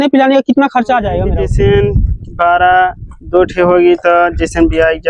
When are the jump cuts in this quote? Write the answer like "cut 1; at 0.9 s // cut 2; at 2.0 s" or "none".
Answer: cut 1; at 1.2 s